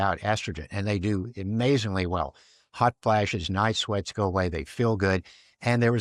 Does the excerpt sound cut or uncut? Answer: uncut